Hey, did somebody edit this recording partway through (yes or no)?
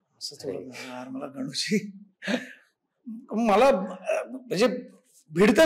no